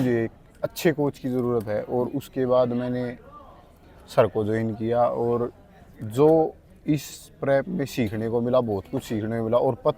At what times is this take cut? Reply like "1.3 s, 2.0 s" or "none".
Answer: none